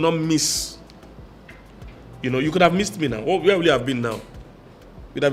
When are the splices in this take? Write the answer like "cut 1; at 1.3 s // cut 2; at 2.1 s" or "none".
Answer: none